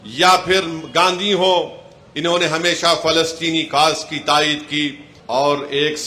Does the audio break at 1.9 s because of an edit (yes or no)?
no